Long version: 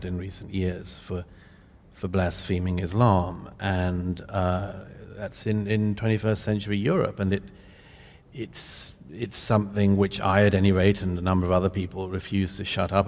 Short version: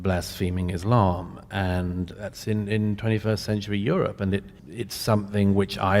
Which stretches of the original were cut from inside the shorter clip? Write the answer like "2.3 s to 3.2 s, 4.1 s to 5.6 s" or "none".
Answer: 4.2 s to 5.1 s, 7.6 s to 9.0 s